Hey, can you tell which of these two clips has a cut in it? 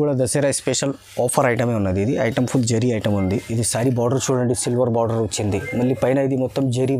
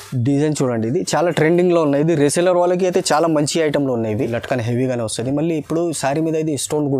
second; 1 cut; at 4.2 s

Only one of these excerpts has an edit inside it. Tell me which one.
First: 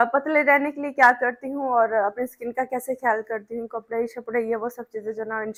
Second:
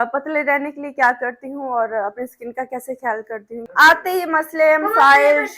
second; 1 cut; at 3.6 s

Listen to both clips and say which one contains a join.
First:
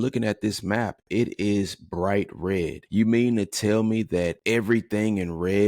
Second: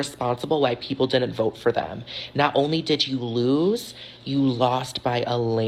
first; 2 cuts; at 2.8 s, 4.4 s

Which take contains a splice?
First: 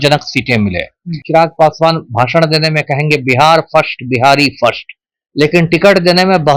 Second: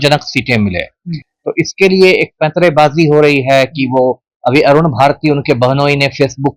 first; 1 cut; at 1.2 s

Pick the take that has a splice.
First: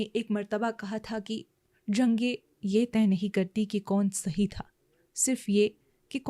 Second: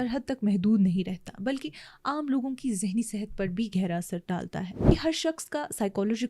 second; 1 cut; at 4.7 s

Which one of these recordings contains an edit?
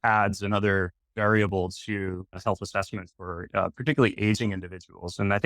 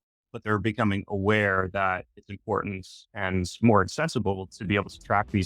first; 1 cut; at 2.3 s

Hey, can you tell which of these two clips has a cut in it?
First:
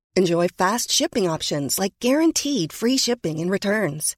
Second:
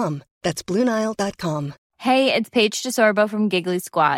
second; 1 cut; at 1.8 s

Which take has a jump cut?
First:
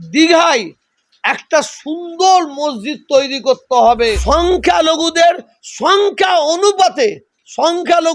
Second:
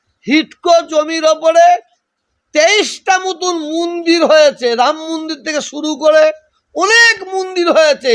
first; 1 cut; at 4.2 s

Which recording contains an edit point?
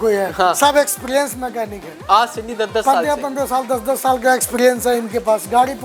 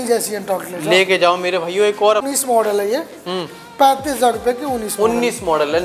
second; 1 cut; at 2.3 s

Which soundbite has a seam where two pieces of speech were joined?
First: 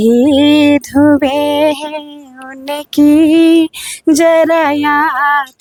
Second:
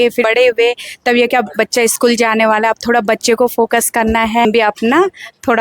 second; 1 cut; at 4.4 s

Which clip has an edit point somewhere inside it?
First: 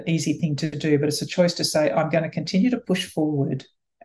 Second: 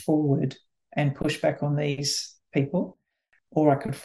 second; 1 cut; at 2.0 s

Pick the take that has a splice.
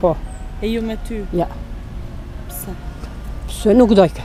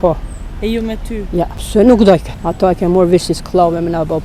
second; 2 cuts; at 1.6 s, 2.4 s

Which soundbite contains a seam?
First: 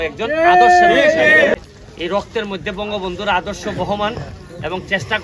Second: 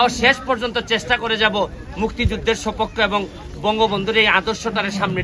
first; 1 cut; at 1.5 s

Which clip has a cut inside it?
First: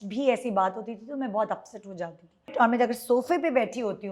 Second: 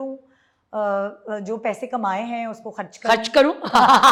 first; 1 cut; at 2.5 s

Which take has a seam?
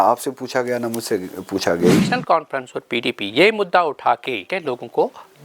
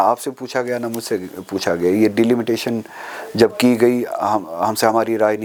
first; 2 cuts; at 2.0 s, 4.5 s

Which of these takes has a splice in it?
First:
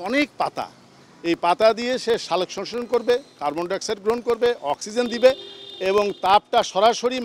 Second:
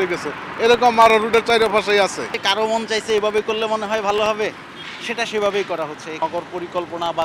second; 2 cuts; at 2.4 s, 6.2 s

